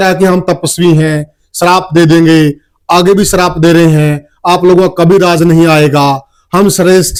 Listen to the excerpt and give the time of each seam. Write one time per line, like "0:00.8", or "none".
none